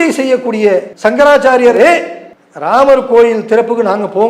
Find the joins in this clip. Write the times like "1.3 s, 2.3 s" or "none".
0.9 s, 1.8 s